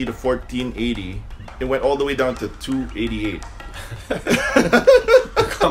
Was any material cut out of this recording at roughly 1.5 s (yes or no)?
yes